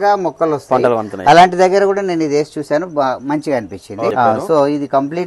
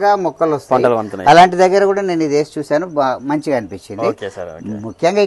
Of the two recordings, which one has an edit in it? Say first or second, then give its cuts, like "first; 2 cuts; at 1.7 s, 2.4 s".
first; 1 cut; at 4.1 s